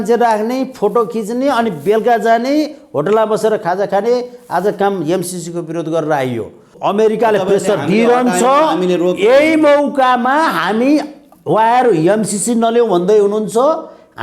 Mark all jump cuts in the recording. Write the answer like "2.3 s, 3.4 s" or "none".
6.7 s